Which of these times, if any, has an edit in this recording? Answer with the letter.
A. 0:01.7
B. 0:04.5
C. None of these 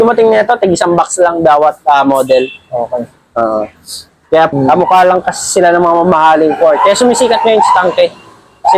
B